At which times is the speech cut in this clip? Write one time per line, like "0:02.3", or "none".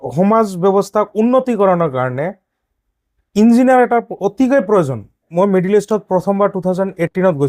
0:05.3